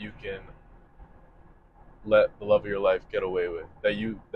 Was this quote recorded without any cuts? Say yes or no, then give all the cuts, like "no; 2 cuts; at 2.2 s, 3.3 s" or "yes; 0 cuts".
yes; 0 cuts